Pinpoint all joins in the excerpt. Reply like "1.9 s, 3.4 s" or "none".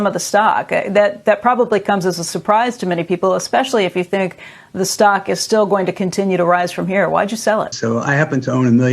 7.8 s